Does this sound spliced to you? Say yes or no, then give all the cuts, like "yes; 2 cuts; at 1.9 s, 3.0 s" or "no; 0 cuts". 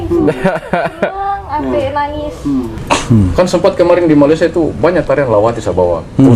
yes; 1 cut; at 2.8 s